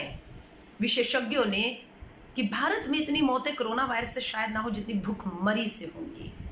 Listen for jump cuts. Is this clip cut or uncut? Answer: uncut